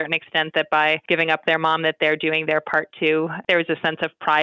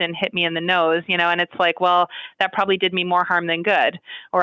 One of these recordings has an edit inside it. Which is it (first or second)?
first